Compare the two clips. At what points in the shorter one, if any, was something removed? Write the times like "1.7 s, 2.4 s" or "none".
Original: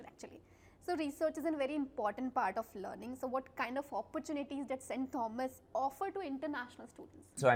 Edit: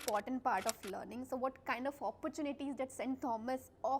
none